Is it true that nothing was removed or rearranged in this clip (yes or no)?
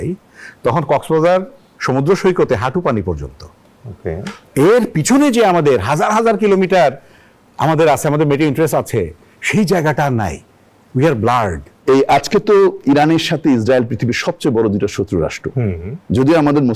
no